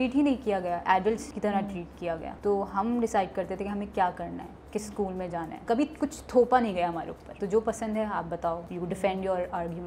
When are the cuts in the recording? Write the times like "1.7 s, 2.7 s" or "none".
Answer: 1.3 s, 2.3 s, 5.6 s, 7.2 s, 8.7 s